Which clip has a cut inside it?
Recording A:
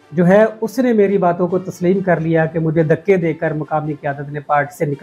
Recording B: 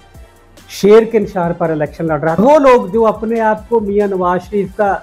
B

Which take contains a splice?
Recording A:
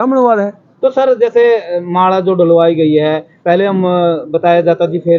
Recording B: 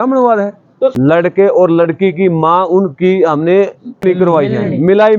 B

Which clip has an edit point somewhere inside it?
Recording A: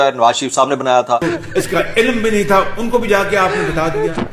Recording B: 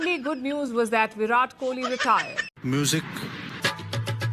A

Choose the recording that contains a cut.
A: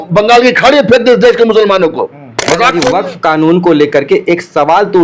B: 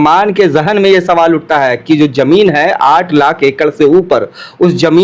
A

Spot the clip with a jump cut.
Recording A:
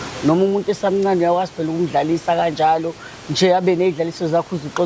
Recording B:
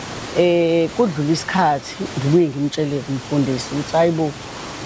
B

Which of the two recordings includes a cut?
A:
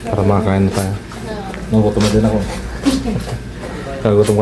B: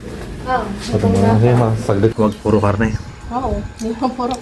B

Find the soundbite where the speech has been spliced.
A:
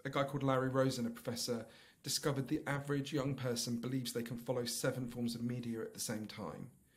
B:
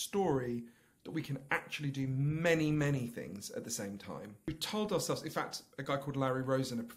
B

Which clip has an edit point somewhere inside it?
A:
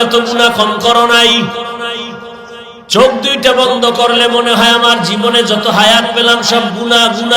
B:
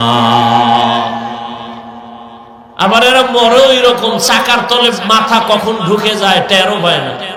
A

